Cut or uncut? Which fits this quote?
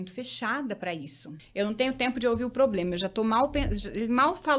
cut